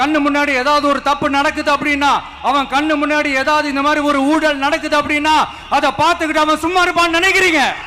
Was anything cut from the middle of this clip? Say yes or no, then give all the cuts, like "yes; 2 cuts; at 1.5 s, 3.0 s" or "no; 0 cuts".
no; 0 cuts